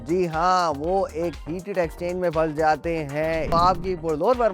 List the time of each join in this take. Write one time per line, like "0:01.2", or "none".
0:03.5